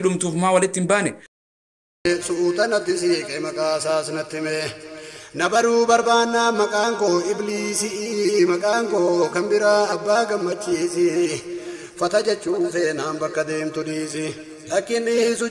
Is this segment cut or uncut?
cut